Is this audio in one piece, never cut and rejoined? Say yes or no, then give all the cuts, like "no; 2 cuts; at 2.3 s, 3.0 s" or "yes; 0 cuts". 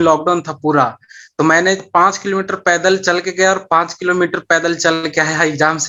yes; 0 cuts